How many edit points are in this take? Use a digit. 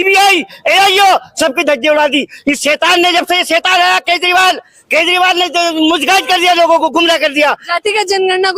0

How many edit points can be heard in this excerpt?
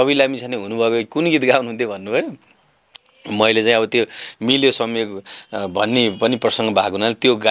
0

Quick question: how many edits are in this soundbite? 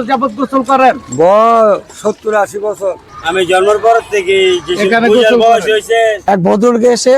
2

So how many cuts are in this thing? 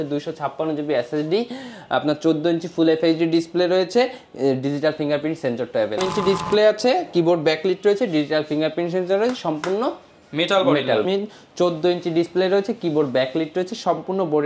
2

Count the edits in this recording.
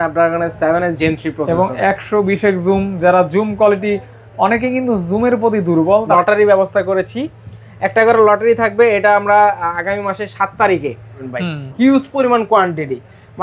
2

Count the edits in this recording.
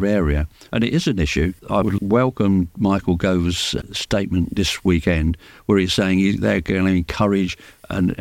2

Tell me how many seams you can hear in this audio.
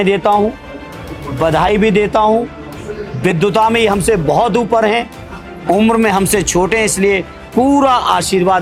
0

